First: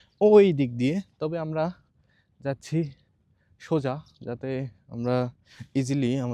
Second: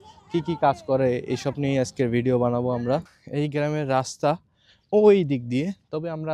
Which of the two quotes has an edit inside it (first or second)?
second